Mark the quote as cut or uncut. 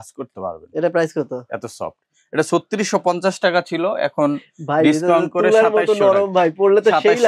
uncut